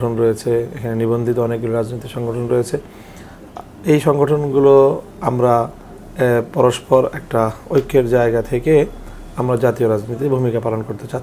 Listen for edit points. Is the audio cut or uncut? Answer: uncut